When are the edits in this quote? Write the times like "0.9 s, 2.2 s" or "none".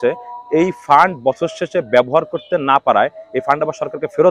none